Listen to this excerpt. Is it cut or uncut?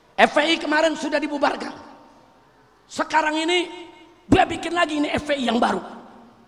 uncut